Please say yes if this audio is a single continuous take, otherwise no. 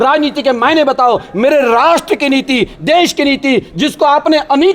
yes